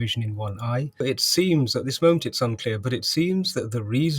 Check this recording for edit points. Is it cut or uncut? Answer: cut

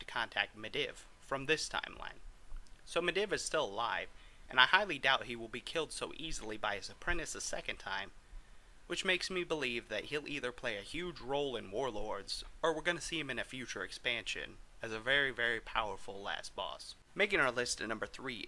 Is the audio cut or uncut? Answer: uncut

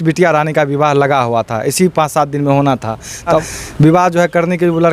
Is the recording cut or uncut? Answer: cut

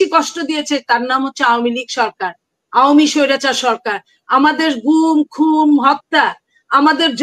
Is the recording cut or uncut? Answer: uncut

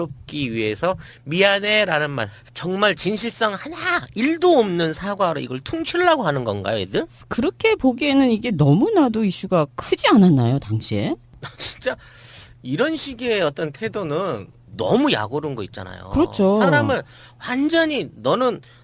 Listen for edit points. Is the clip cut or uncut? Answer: cut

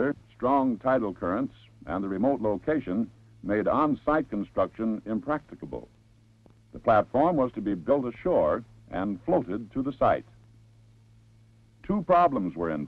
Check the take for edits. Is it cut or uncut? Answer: uncut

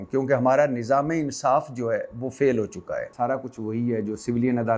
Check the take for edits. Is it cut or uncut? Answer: cut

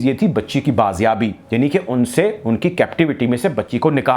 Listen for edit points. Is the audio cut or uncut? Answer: uncut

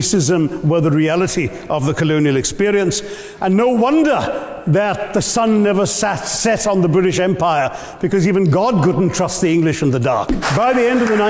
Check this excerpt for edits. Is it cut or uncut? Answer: cut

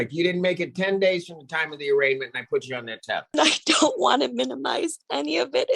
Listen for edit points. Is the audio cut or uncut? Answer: cut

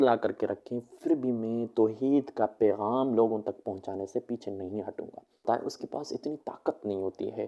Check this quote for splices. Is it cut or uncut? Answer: cut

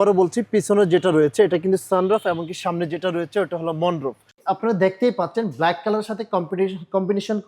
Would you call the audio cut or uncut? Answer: cut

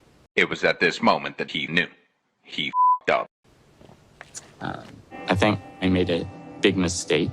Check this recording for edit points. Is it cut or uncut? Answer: cut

